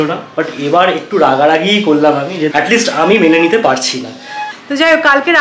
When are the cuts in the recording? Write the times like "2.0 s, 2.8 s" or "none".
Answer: 2.5 s, 4.4 s